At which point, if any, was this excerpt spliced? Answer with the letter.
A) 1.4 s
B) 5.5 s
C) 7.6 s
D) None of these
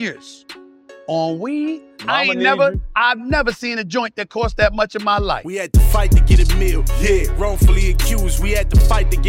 B